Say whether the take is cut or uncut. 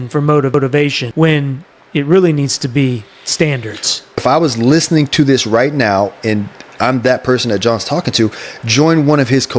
cut